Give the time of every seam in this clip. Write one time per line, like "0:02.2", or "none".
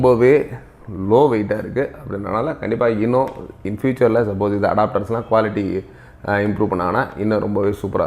none